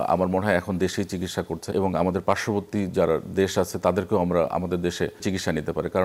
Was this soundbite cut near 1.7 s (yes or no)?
yes